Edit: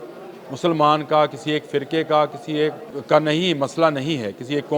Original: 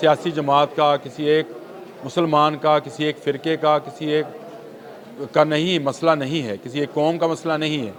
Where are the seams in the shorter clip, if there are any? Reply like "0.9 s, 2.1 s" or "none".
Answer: 2.9 s